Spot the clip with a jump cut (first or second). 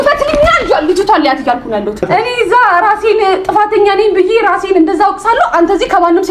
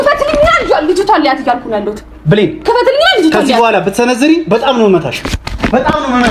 first